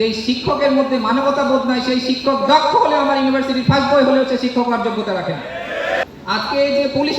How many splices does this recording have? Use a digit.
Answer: 1